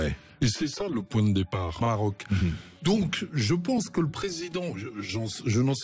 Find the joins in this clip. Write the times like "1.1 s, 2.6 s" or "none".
1.8 s